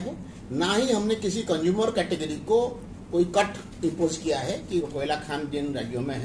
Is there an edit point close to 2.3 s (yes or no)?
no